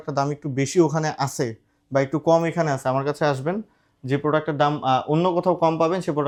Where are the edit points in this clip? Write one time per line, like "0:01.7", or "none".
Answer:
none